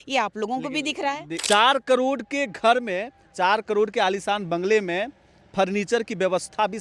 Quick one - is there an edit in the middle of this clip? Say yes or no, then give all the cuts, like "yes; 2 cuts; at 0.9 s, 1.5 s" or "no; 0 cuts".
yes; 1 cut; at 1.4 s